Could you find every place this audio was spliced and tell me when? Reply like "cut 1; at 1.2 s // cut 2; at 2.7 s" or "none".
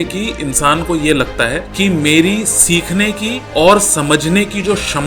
cut 1; at 1.7 s // cut 2; at 3.3 s